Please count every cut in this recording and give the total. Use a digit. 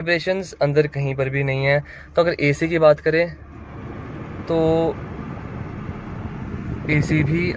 0